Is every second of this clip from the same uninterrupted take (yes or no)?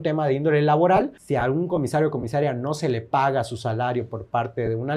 no